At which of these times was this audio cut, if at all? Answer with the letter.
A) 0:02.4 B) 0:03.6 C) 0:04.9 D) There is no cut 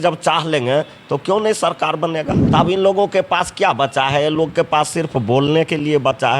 A